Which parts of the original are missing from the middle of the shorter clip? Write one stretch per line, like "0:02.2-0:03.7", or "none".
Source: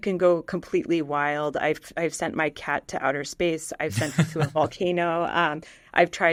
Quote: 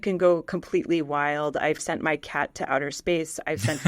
0:01.8-0:02.2